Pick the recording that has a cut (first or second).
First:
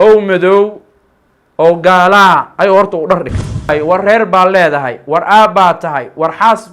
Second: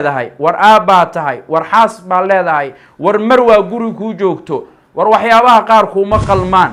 first